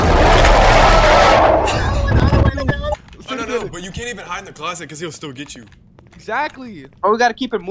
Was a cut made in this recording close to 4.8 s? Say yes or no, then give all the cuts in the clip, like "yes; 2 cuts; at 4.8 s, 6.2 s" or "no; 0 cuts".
no; 1 cut; at 2.9 s